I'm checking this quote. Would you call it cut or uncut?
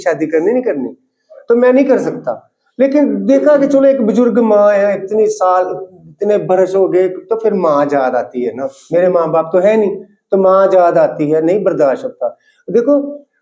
uncut